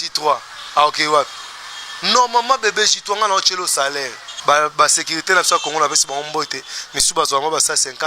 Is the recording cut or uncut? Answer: cut